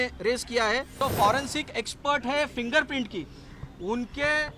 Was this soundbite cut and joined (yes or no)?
yes